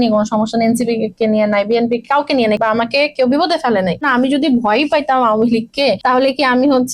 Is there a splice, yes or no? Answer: yes